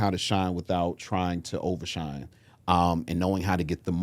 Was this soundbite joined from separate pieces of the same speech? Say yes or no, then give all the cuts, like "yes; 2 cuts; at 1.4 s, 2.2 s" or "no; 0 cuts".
no; 0 cuts